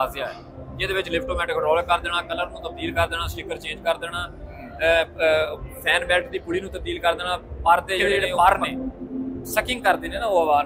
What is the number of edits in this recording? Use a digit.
1